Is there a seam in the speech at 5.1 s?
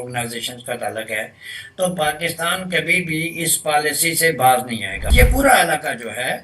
yes; 1 cut; at 5.1 s

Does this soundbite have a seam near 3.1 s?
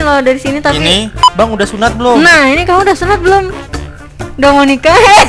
no; 1 cut; at 1.1 s

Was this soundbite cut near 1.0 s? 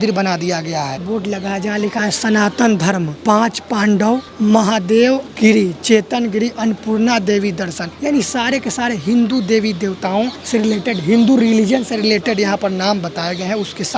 yes; 6 cuts; at 1.0 s, 3.1 s, 4.3 s, 5.3 s, 7.9 s, 10.4 s

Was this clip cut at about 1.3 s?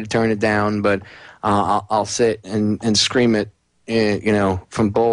no; 1 cut; at 2.6 s

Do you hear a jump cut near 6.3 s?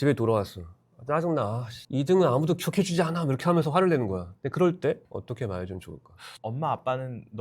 yes; 1 cut; at 6.3 s

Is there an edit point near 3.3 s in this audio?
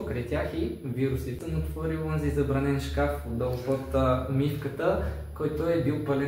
no; 1 cut; at 1.4 s

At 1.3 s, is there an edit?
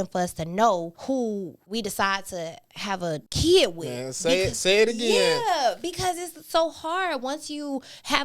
yes; 2 cuts; at 1.3 s, 3.3 s

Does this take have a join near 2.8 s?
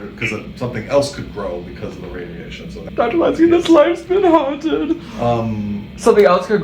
yes; 1 cut; at 2.8 s

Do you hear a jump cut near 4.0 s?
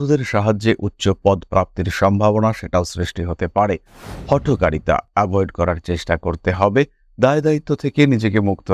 yes; 1 cut; at 4.0 s

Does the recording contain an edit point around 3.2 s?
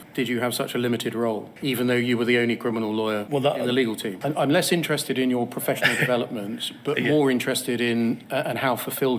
yes; 3 cuts; at 3.2 s, 4.1 s, 8.2 s

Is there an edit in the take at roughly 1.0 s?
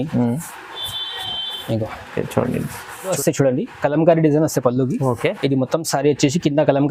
no; 1 cut; at 3.2 s

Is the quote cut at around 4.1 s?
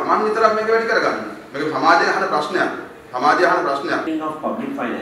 yes; 1 cut; at 4.1 s

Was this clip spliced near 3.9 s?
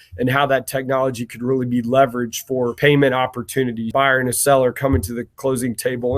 yes; 2 cuts; at 2.7 s, 3.9 s

